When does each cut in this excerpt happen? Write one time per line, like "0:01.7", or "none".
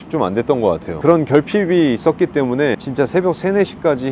0:01.0
0:02.8